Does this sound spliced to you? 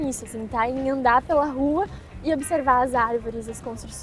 no; 0 cuts

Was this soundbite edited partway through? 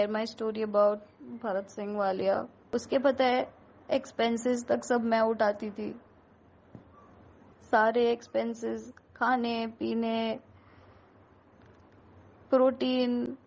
yes; 1 cut; at 2.6 s

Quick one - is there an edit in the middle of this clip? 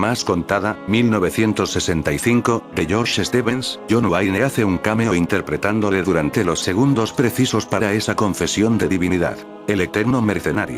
yes; 1 cut; at 9.5 s

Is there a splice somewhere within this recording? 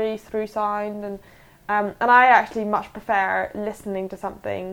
no; 0 cuts

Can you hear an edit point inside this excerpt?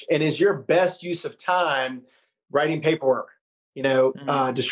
no; 0 cuts

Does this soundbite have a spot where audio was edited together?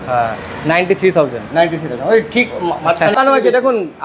yes; 1 cut; at 3.1 s

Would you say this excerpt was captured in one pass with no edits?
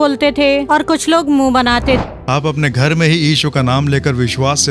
no; 1 cut; at 2.0 s

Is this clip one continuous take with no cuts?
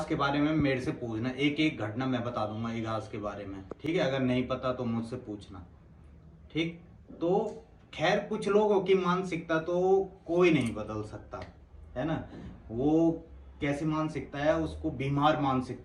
yes; 0 cuts

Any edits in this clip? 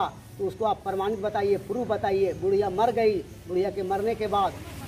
no; 0 cuts

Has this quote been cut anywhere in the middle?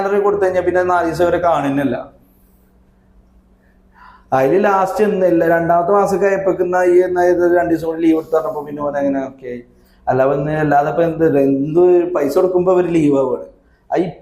no; 0 cuts

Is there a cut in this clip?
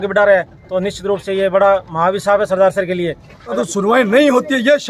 yes; 1 cut; at 3.5 s

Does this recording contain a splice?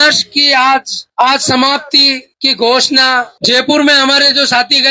no; 0 cuts

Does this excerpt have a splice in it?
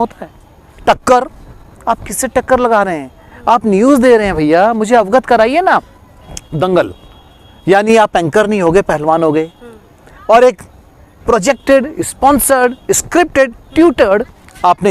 no; 0 cuts

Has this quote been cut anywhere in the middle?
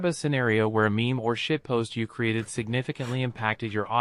no; 0 cuts

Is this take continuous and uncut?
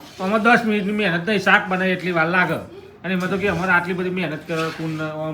yes; 0 cuts

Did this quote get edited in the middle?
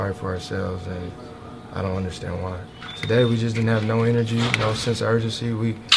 yes; 1 cut; at 2.7 s

